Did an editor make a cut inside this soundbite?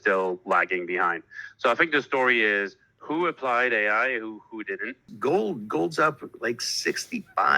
yes; 1 cut; at 5.1 s

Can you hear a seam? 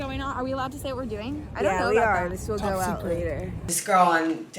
yes; 1 cut; at 3.7 s

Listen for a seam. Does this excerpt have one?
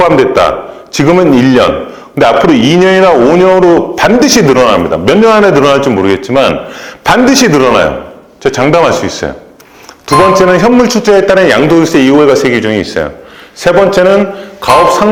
no; 0 cuts

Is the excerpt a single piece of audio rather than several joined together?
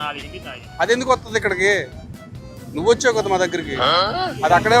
no; 1 cut; at 2.1 s

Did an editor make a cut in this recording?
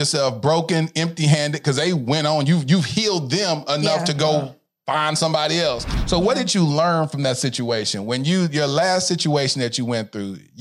yes; 1 cut; at 5.9 s

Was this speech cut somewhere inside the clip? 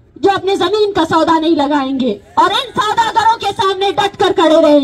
no; 0 cuts

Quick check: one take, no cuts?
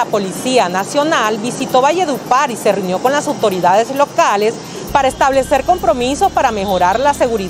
yes; 0 cuts

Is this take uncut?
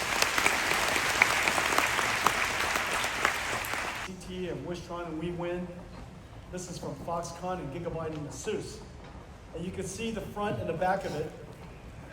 no; 1 cut; at 4.0 s

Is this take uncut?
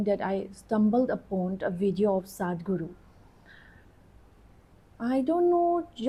yes; 0 cuts

